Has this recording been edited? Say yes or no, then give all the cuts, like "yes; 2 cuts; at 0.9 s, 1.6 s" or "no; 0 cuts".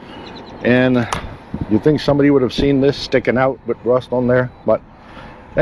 no; 0 cuts